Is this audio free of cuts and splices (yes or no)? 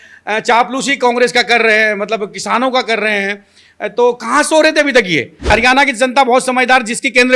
no